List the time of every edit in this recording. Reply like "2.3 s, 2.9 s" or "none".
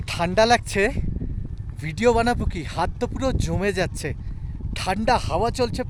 none

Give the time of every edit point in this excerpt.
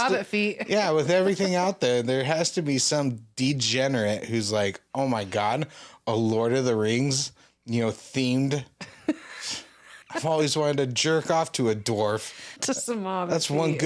10.0 s, 12.6 s

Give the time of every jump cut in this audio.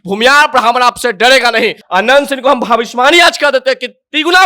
1.8 s

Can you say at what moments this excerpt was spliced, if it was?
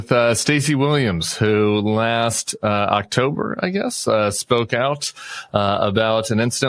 none

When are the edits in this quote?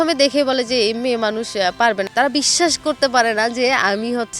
2.0 s

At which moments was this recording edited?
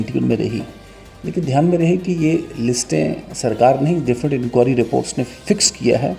none

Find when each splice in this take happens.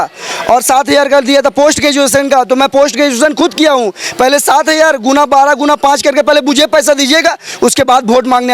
none

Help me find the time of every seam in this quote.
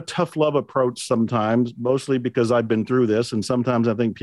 none

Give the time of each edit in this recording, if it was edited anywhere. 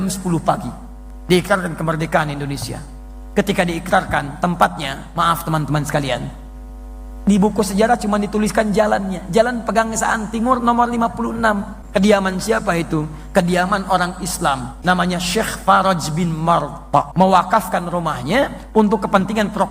11.7 s, 14.7 s, 17.1 s

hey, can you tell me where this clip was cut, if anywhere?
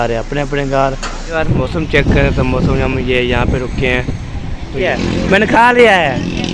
1.2 s, 4.9 s

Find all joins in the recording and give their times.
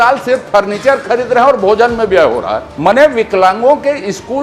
2.6 s

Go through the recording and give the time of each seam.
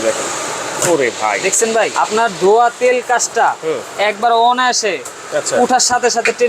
1.9 s

